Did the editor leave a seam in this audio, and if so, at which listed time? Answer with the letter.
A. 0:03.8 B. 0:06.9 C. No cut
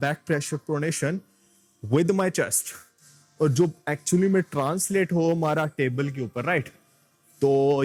C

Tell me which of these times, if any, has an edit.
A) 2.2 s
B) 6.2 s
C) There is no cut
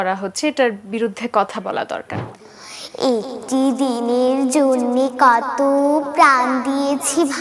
A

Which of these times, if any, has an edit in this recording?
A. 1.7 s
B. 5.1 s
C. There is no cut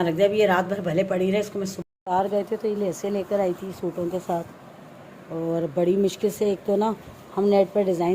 A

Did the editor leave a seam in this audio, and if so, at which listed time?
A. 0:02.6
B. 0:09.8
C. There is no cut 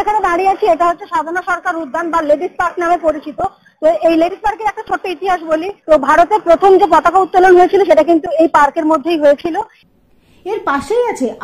B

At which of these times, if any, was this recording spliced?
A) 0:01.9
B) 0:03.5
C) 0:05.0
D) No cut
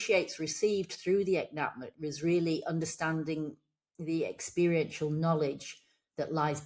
A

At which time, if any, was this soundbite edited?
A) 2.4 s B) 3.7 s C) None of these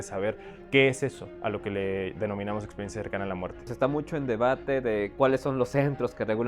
B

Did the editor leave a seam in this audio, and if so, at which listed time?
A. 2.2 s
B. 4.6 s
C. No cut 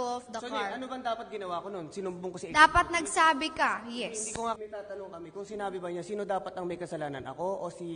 B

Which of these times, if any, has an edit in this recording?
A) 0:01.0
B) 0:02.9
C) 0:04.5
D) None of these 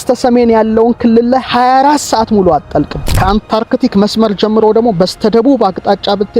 B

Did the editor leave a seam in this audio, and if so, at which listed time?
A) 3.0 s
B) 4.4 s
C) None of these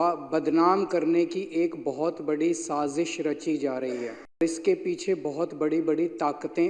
B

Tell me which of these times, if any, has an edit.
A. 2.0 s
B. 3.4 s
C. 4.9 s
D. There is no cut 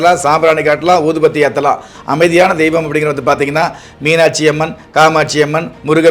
A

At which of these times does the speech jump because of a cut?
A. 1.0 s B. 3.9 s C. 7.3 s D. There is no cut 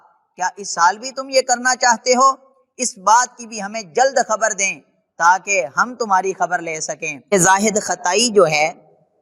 C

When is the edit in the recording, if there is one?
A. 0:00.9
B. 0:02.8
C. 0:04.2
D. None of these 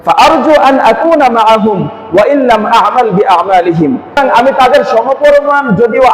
C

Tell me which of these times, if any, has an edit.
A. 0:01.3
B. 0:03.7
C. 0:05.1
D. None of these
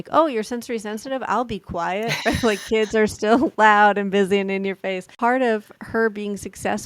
C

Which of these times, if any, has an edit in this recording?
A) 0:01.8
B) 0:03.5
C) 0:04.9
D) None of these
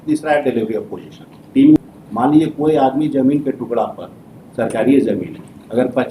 A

